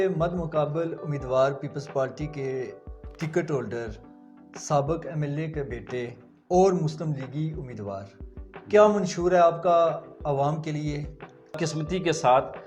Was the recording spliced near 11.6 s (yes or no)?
yes